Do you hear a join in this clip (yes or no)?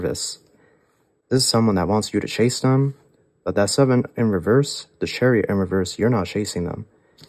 no